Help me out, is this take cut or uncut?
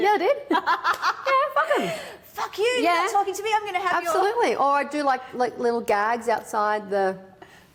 uncut